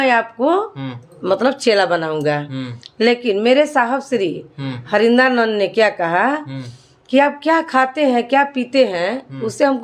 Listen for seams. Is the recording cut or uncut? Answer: cut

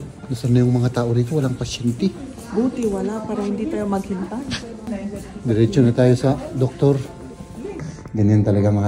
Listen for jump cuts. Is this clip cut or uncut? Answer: cut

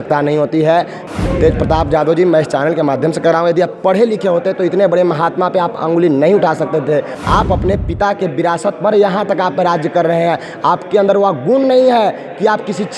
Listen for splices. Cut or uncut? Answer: cut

